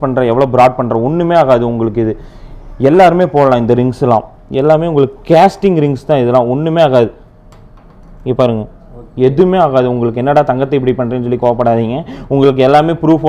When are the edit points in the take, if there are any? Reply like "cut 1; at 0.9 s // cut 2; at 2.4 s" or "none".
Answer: none